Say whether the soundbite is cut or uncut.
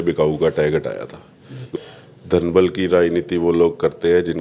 cut